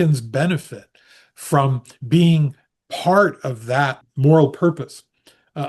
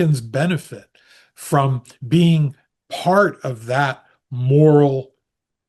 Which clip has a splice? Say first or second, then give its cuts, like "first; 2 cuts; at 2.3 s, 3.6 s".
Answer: first; 1 cut; at 4.1 s